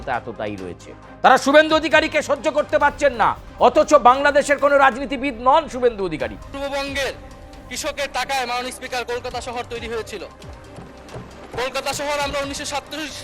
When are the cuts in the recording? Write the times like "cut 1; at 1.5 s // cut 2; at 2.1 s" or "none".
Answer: cut 1; at 6.4 s